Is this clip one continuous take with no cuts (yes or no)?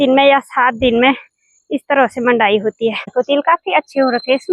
no